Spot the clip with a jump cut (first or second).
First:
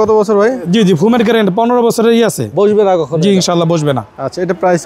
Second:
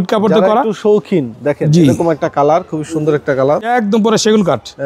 second